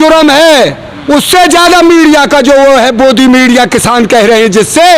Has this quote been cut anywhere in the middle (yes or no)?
no